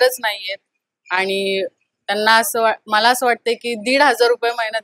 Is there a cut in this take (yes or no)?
no